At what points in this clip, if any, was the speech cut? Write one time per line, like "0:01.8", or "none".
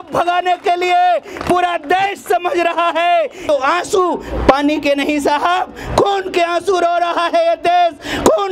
0:03.5